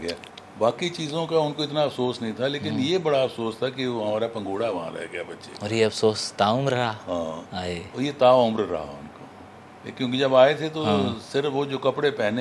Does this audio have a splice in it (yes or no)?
no